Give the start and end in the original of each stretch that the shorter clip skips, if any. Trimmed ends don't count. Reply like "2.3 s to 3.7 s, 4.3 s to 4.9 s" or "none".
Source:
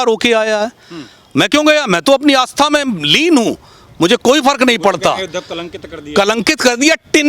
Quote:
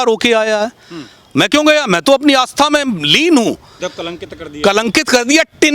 3.8 s to 5.3 s